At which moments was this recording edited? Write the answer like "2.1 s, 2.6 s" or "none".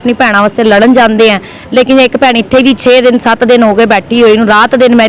none